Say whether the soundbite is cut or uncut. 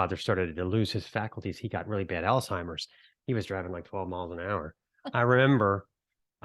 uncut